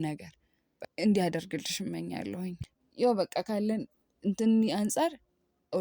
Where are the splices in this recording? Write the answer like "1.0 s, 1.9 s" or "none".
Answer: 2.6 s